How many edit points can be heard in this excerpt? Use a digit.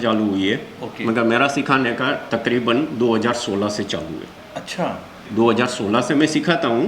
1